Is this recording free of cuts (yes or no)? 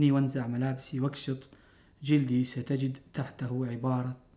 no